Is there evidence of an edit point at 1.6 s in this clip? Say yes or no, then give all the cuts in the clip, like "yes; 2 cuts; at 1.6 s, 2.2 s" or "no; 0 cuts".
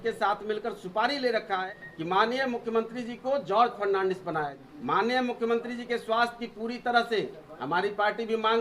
yes; 2 cuts; at 1.6 s, 4.6 s